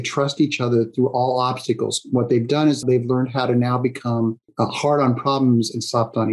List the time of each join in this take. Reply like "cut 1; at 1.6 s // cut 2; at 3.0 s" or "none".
cut 1; at 2.8 s // cut 2; at 4.4 s